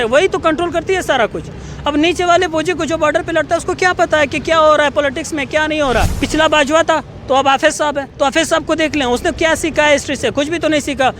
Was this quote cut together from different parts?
yes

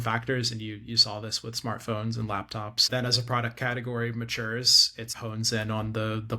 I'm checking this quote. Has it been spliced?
yes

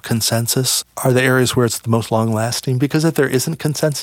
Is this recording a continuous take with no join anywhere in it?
yes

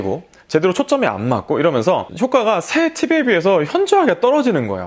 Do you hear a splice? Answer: no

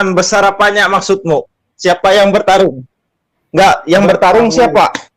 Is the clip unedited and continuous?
yes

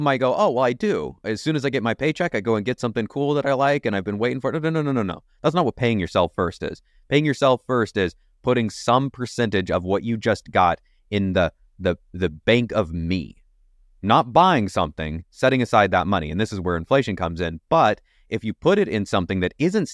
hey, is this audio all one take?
yes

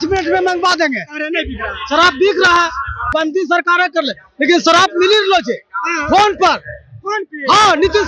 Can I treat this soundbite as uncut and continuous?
no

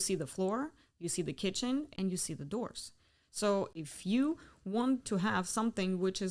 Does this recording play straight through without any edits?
no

